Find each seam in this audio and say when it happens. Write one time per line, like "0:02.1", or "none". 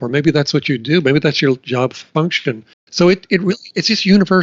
0:02.8